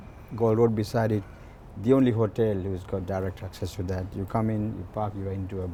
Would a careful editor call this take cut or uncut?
uncut